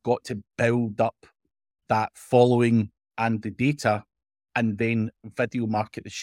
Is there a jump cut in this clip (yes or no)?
no